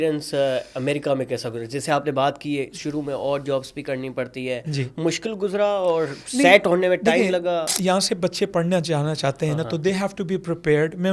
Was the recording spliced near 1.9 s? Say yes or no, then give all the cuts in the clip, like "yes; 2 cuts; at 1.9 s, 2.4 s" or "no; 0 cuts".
no; 0 cuts